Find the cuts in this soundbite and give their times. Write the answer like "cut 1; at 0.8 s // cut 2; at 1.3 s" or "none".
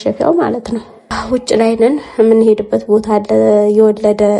cut 1; at 1.1 s